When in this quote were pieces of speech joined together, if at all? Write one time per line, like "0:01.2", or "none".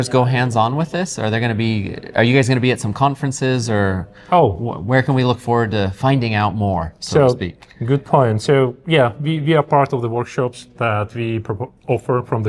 none

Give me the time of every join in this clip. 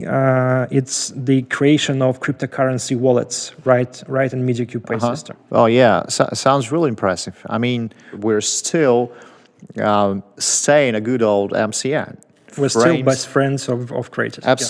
0:05.3
0:12.5

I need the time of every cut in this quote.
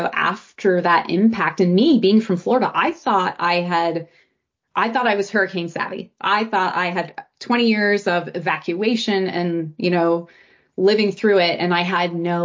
none

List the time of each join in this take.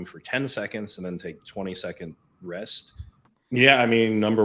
0:03.3

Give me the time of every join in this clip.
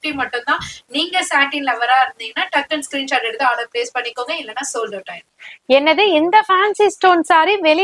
none

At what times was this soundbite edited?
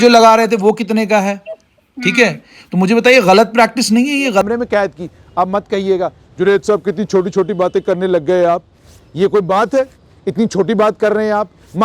0:04.4

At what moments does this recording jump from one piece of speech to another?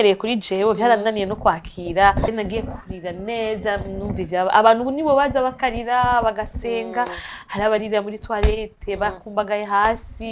0:02.3

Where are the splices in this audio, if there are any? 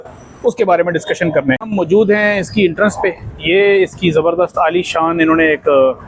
0:01.6

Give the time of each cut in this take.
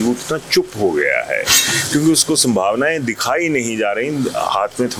none

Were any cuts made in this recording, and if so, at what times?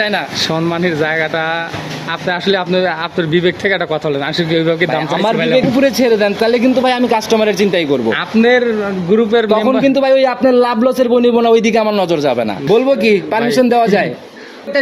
0:12.6

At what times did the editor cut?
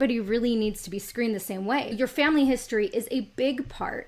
0:01.9

